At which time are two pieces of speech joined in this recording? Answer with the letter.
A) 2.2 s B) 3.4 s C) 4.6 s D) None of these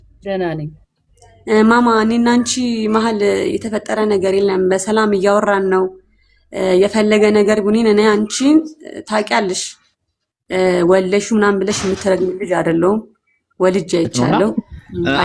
D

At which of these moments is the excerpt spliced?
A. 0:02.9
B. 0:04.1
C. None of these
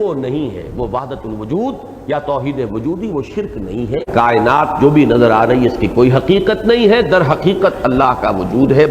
B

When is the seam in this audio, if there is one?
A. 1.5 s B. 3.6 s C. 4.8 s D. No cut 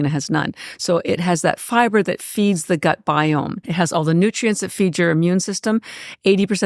B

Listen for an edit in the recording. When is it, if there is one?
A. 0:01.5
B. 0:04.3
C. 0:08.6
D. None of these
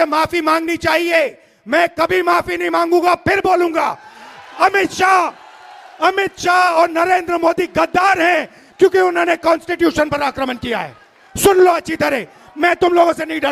D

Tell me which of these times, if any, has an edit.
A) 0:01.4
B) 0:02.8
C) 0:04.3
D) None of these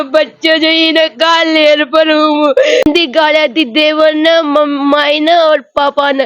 B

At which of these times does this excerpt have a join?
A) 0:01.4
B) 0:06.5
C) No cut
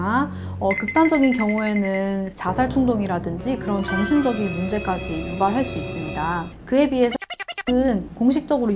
B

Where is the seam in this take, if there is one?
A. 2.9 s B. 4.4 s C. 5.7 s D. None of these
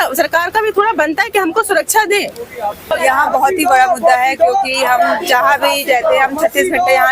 A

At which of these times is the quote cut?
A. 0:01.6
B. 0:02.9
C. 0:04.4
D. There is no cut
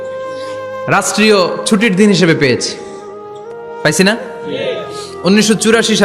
D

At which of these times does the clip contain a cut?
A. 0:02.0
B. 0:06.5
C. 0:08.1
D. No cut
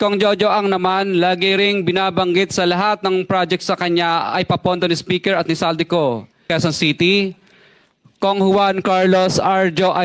B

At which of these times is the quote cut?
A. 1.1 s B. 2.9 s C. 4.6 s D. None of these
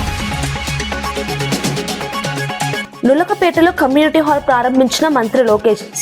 B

